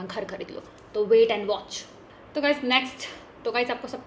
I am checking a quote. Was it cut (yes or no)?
no